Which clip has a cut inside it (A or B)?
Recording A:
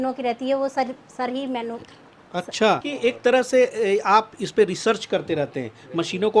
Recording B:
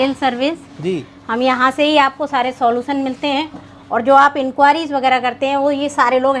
A